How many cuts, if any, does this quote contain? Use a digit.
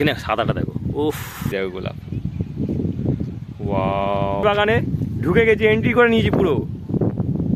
2